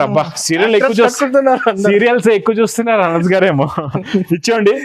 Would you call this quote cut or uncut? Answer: uncut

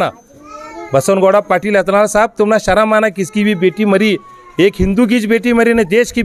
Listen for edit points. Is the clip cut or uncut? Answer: uncut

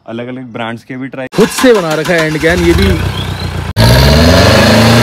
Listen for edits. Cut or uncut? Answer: cut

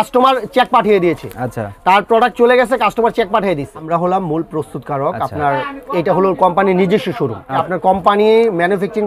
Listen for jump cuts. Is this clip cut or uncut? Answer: cut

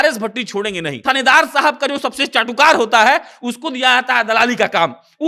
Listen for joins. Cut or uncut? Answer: cut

